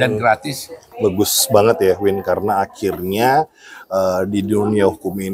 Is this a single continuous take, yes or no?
no